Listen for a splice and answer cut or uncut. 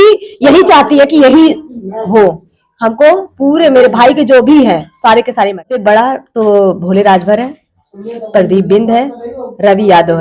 cut